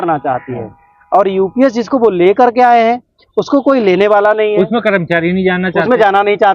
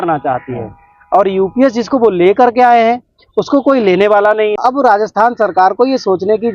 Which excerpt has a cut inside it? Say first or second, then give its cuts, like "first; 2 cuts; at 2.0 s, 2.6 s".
second; 1 cut; at 4.6 s